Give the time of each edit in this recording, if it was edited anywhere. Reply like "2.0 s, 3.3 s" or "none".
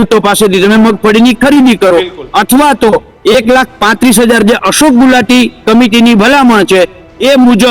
none